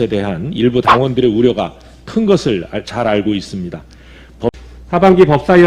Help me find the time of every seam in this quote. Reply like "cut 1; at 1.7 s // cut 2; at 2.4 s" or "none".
cut 1; at 4.6 s